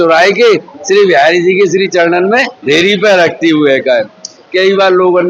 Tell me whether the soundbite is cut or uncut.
cut